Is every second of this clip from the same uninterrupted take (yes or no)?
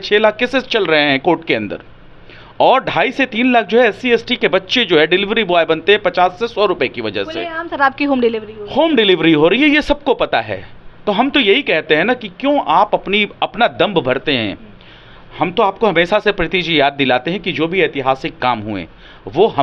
yes